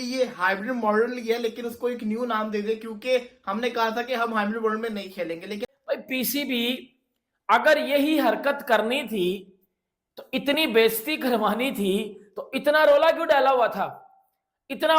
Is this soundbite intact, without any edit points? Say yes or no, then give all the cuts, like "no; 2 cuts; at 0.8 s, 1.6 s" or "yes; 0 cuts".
no; 1 cut; at 5.7 s